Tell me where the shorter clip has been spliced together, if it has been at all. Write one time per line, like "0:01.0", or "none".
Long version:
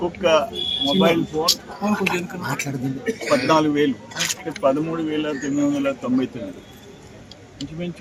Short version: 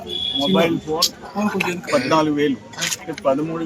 0:01.8